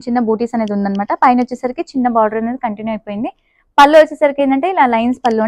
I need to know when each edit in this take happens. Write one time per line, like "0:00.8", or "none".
none